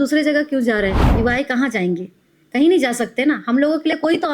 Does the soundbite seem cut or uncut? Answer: cut